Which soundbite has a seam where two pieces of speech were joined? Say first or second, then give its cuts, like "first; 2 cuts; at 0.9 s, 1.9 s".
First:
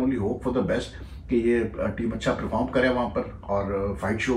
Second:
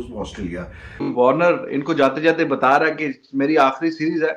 second; 1 cut; at 1.1 s